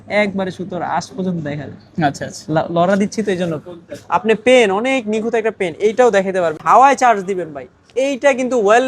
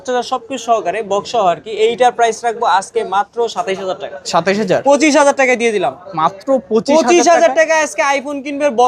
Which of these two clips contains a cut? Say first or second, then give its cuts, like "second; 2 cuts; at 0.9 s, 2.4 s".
first; 1 cut; at 6.6 s